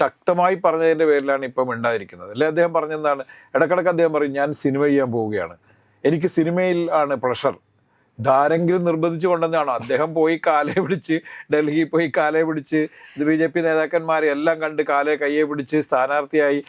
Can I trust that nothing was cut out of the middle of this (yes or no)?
yes